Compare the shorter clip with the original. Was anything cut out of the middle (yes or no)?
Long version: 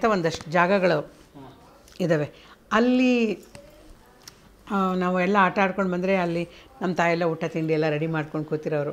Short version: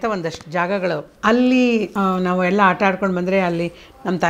yes